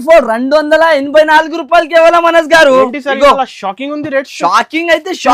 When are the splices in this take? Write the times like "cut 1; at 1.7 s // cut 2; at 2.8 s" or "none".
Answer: none

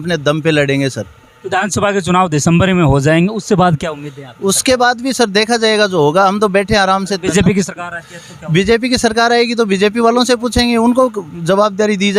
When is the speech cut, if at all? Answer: none

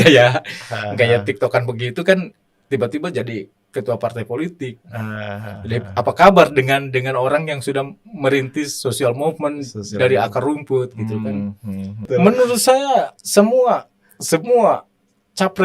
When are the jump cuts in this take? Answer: cut 1; at 12.1 s

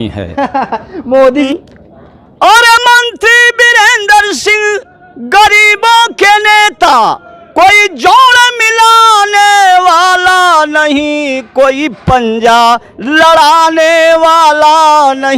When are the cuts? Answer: cut 1; at 1.5 s

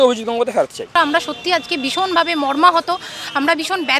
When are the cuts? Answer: cut 1; at 0.9 s

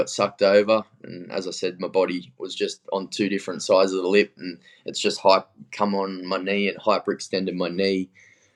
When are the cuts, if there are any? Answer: none

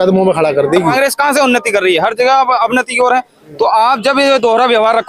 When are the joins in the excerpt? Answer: cut 1; at 0.9 s

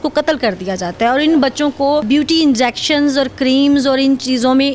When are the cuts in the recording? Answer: cut 1; at 2.0 s

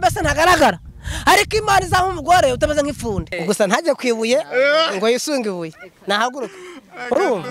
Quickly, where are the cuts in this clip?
cut 1; at 3.4 s

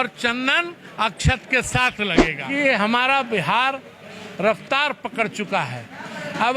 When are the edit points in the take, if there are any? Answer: cut 1; at 2.3 s

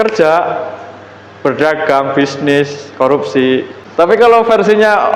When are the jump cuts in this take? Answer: cut 1; at 4.1 s

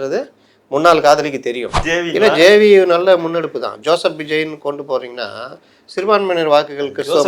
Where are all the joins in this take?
cut 1; at 1.8 s

